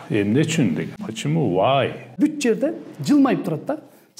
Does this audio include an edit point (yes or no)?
yes